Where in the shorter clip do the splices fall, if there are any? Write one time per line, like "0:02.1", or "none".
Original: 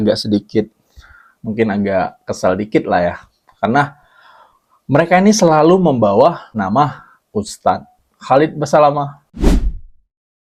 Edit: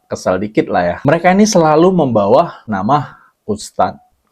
0:01.0